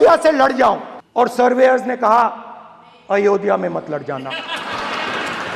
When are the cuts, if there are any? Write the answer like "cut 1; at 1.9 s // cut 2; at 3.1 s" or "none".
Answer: cut 1; at 0.9 s